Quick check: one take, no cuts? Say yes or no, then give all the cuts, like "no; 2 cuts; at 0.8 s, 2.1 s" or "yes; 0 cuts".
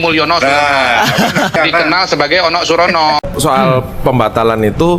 no; 1 cut; at 3.3 s